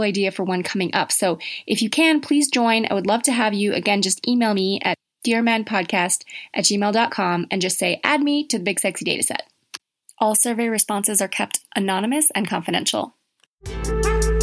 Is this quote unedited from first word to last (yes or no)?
no